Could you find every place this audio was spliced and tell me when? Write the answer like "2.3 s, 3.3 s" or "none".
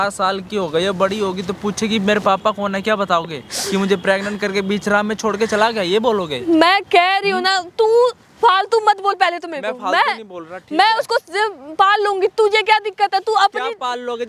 none